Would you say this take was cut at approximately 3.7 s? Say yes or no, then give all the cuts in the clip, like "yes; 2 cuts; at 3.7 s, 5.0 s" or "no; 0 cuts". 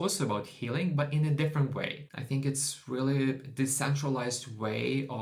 no; 1 cut; at 2.0 s